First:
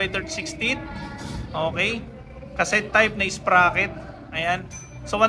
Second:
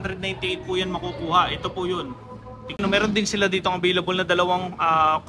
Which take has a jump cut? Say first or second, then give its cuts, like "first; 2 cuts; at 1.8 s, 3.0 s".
second; 1 cut; at 2.8 s